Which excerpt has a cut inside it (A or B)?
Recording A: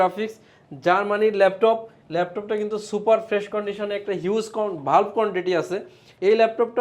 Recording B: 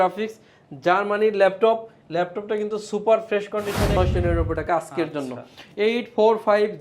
B